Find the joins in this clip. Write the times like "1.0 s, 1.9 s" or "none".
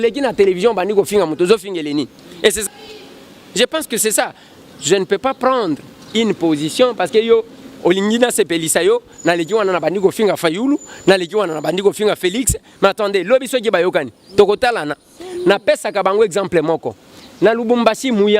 2.6 s